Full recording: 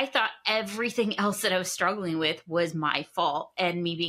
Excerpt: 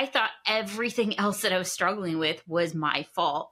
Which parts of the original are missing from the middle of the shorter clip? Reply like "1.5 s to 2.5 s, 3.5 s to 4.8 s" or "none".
none